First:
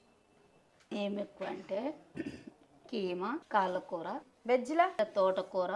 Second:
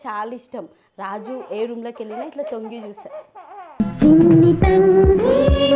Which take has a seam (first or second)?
first